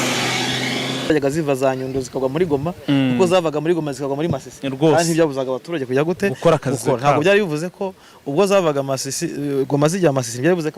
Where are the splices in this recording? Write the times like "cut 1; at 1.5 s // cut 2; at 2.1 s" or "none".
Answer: cut 1; at 1.1 s